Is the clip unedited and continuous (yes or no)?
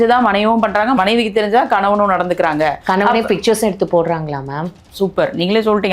no